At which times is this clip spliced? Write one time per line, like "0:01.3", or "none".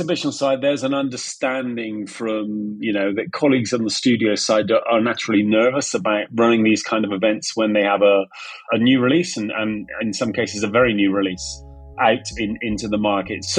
0:06.3